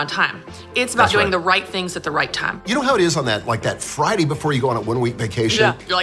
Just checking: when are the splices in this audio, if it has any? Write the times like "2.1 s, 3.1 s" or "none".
2.6 s